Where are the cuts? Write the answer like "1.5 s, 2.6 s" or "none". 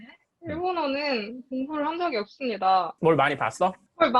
2.9 s